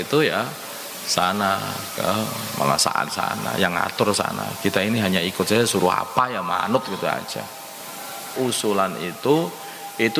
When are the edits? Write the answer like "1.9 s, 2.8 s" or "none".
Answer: 8.3 s